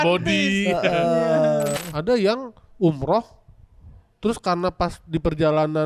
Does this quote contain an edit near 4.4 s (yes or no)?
no